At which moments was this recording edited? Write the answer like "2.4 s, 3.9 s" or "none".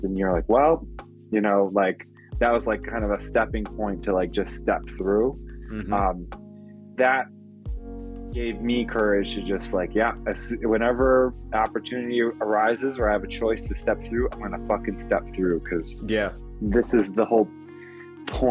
none